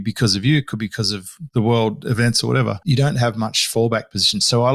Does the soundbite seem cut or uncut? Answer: cut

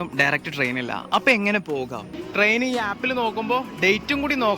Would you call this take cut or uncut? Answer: cut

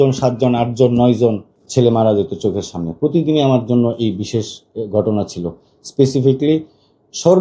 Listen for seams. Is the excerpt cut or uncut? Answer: uncut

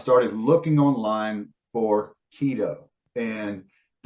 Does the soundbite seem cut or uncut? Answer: cut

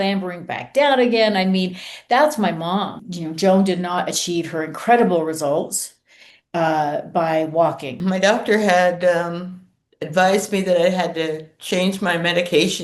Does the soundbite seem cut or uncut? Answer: cut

